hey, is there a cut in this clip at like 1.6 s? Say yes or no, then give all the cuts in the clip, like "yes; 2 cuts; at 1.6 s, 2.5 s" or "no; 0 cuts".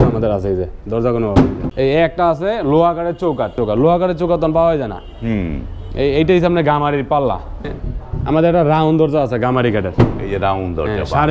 yes; 3 cuts; at 1.6 s, 3.5 s, 7.8 s